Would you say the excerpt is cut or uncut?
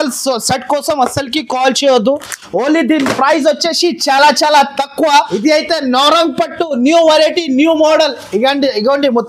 cut